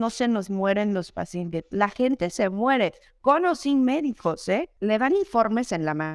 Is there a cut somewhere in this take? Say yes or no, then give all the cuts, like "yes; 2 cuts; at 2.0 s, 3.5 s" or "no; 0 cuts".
yes; 1 cut; at 4.7 s